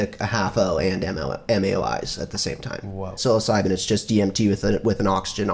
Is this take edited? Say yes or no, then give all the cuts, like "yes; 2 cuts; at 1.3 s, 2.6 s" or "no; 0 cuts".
yes; 1 cut; at 3.2 s